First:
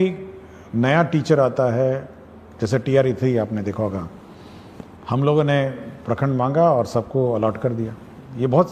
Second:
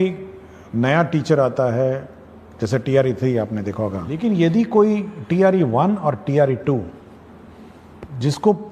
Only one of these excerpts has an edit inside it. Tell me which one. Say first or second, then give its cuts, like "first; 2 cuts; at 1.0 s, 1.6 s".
second; 1 cut; at 4.1 s